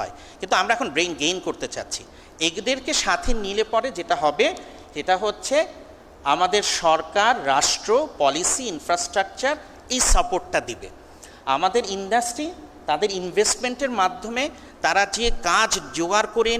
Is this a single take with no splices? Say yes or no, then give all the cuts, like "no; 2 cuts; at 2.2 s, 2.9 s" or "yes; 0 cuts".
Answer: yes; 0 cuts